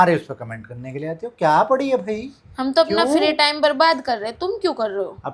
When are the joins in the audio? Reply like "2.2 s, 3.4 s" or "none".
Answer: none